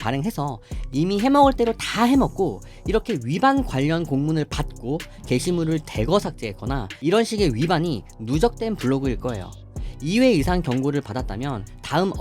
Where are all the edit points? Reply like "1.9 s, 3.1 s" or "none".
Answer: none